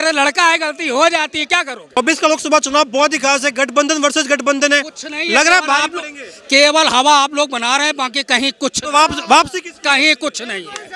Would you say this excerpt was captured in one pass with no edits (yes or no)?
no